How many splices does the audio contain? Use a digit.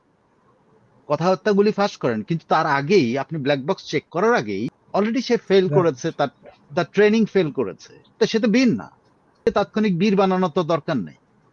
2